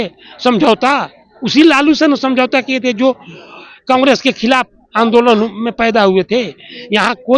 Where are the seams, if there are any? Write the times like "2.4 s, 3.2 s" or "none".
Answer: none